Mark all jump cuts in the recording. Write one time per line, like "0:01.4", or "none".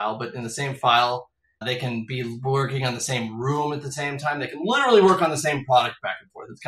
0:01.6